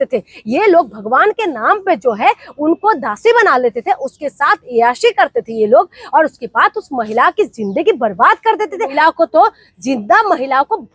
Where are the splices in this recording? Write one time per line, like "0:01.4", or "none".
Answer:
0:08.9